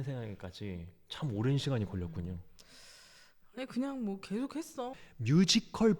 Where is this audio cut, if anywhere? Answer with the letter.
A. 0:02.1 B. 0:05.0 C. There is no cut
B